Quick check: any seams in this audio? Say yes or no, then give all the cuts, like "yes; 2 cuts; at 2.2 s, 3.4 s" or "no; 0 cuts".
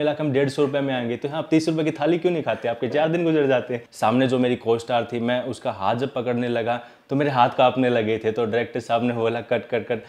yes; 1 cut; at 3.8 s